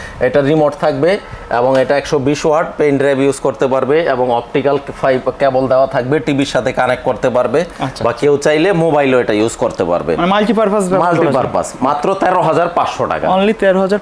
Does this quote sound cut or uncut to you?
uncut